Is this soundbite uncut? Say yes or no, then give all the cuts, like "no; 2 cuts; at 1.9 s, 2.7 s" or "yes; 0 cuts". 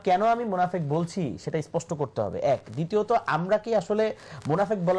yes; 0 cuts